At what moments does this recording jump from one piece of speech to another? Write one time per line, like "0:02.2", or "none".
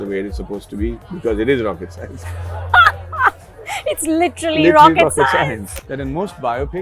0:05.7